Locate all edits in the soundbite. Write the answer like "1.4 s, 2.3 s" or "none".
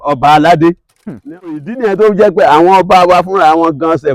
1.6 s